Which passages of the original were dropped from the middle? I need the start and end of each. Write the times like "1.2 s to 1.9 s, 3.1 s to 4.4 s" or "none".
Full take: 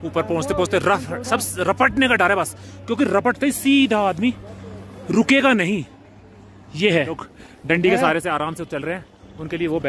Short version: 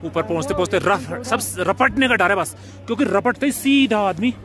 none